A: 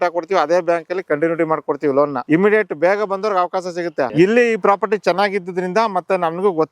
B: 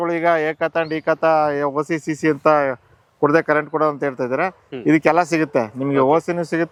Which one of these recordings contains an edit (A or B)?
A